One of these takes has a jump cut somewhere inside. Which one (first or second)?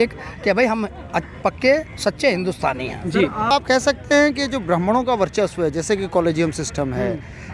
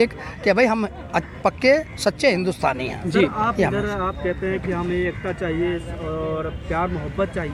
first